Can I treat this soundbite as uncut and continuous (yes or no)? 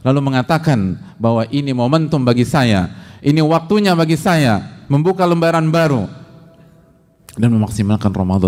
yes